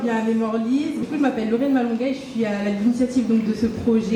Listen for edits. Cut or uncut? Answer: cut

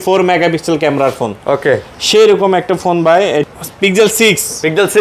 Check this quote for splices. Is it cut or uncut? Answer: cut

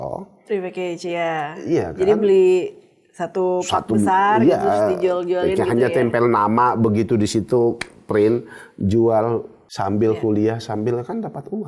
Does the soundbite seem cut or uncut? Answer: cut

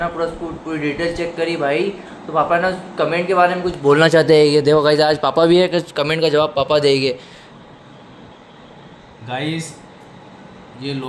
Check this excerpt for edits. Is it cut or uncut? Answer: uncut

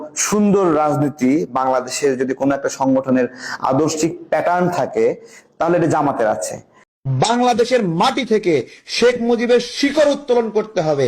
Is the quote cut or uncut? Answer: cut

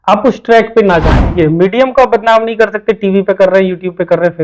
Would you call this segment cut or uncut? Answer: cut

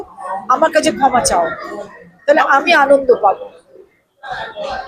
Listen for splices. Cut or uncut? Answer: uncut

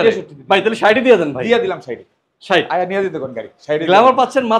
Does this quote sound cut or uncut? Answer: uncut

